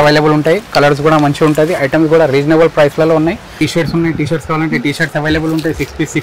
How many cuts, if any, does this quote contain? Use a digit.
1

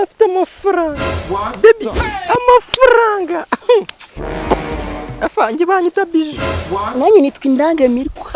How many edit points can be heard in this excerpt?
0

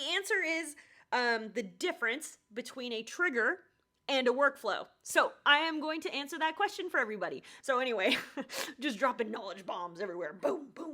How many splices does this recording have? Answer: 1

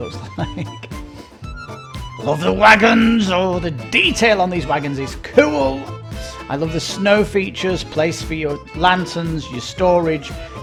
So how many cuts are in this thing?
0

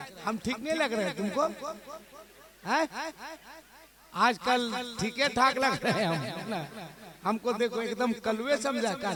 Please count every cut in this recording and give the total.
0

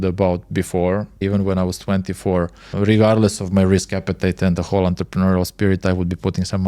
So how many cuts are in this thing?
2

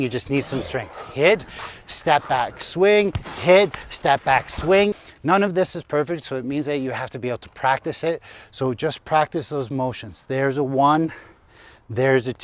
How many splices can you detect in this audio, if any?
1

